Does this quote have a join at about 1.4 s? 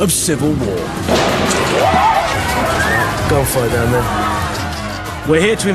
no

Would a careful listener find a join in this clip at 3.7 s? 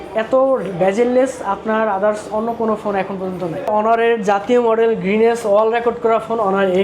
yes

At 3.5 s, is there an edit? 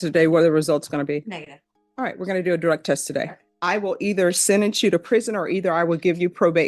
yes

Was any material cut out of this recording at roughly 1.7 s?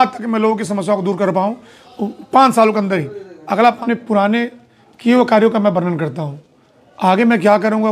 no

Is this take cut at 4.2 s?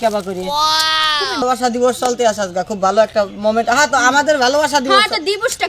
no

